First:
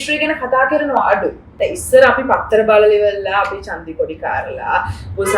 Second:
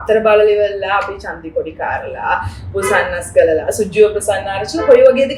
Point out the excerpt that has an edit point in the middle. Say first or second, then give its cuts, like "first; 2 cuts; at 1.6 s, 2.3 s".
first; 1 cut; at 1.4 s